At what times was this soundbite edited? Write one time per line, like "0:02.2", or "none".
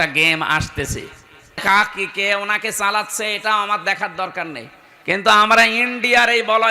0:01.6